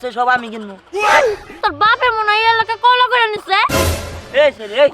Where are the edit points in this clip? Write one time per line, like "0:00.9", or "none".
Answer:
0:01.5
0:03.7